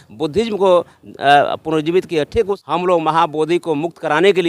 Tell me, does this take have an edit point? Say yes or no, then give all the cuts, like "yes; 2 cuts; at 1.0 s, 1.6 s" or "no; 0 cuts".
yes; 1 cut; at 2.5 s